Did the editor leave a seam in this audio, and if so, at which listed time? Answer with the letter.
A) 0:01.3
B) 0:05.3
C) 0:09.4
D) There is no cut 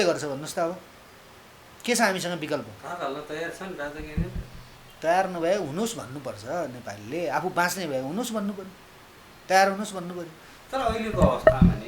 D